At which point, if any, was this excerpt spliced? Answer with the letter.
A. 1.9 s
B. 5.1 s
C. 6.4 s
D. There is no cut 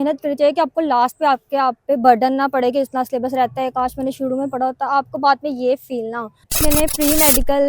C